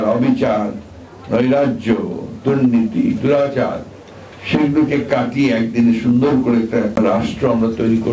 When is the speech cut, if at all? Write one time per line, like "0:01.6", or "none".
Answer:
0:07.0